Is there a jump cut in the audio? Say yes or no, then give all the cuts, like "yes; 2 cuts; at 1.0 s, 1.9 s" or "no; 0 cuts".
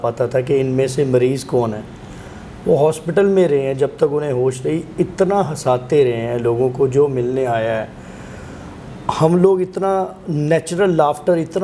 no; 0 cuts